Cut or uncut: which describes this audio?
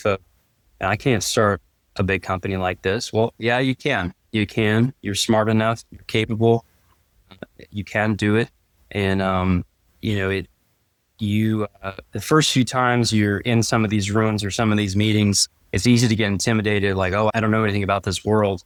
uncut